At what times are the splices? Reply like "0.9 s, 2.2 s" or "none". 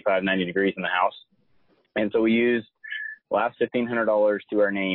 none

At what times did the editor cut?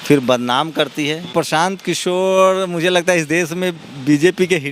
1.3 s

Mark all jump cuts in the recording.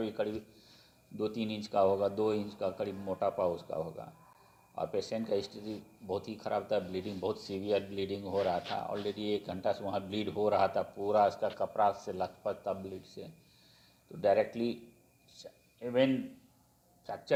none

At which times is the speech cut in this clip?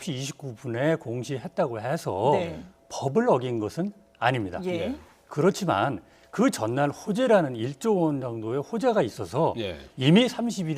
8.1 s

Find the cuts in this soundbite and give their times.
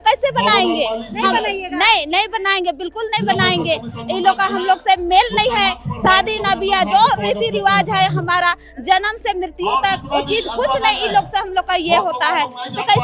none

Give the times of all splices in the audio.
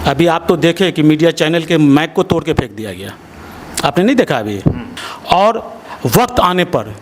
4.9 s

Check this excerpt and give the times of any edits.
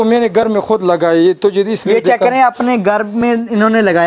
none

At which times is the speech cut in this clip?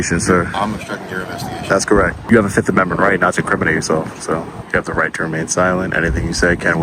2.3 s, 4.6 s

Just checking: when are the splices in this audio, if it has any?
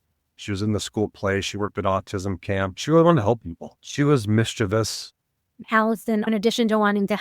5.5 s, 6.3 s

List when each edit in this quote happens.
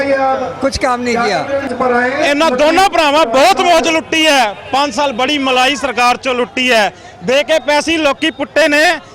1.7 s

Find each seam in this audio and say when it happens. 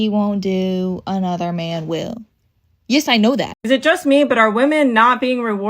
3.6 s

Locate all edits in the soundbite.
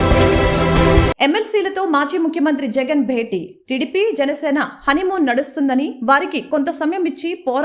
1.1 s

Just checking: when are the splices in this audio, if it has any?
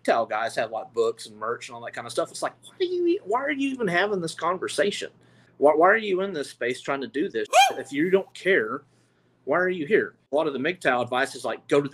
5.4 s, 10.2 s

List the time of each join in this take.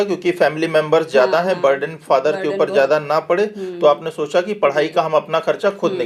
none

